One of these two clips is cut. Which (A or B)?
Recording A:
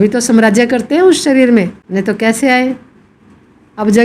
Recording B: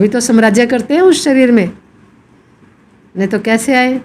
A